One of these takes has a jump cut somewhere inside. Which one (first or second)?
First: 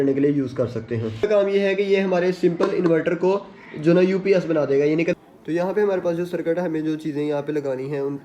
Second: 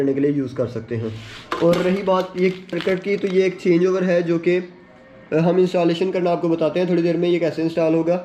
first